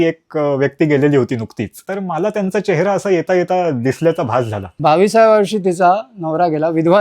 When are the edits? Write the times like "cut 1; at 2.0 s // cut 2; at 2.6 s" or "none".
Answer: cut 1; at 1.8 s // cut 2; at 4.6 s

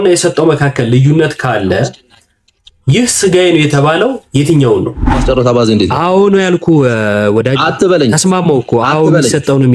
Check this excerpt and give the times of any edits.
cut 1; at 5.2 s

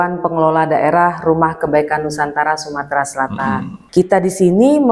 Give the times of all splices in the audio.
cut 1; at 3.8 s

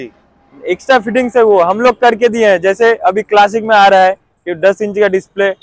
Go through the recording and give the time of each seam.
none

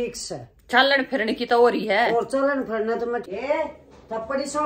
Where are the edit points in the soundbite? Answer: cut 1; at 3.2 s

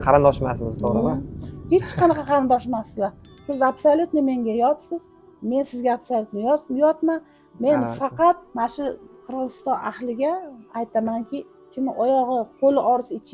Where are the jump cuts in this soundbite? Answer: cut 1; at 8.5 s

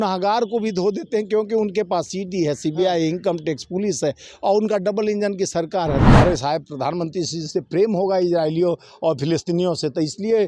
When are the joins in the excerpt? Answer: cut 1; at 6.0 s

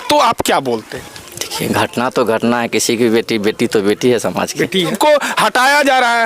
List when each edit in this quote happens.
cut 1; at 4.9 s

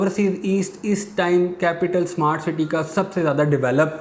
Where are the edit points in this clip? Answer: none

